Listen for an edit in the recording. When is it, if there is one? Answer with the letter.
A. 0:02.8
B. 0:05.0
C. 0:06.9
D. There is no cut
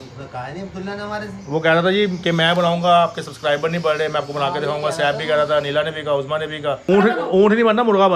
C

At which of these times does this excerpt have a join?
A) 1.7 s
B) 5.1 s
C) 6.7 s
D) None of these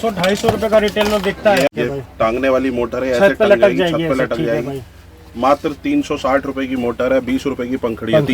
A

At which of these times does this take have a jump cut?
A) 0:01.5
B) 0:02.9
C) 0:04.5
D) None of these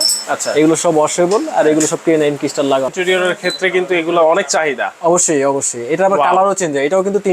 B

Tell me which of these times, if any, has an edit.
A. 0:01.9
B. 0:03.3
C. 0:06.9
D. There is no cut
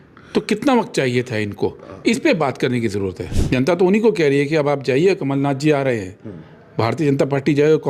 B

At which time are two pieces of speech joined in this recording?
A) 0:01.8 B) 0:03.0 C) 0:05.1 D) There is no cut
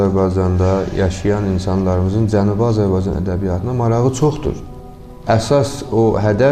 C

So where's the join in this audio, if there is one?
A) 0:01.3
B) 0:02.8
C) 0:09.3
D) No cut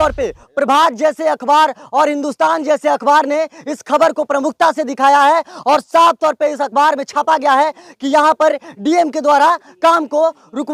D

